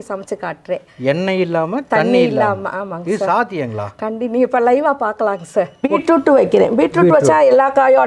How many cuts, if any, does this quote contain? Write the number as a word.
one